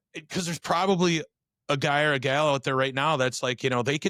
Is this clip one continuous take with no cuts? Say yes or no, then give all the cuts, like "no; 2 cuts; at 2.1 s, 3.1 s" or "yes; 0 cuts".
yes; 0 cuts